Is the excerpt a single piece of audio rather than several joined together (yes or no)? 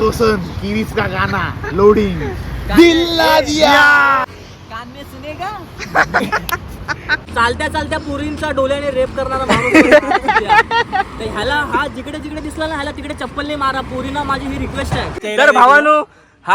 no